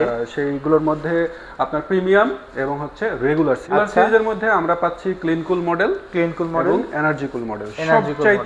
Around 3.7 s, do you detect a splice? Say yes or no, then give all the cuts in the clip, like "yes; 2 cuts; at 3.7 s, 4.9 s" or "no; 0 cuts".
yes; 1 cut; at 3.7 s